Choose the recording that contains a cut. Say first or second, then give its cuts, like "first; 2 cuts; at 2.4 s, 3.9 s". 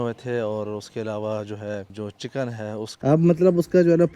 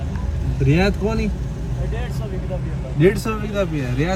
first; 1 cut; at 2.9 s